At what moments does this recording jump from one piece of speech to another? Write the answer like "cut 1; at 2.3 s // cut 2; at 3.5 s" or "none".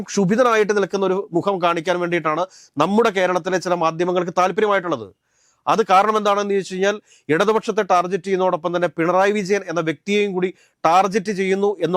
none